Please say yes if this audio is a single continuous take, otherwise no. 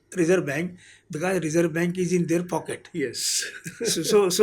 yes